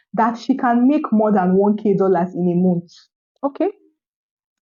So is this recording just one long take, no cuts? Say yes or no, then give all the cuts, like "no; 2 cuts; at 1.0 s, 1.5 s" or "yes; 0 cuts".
yes; 0 cuts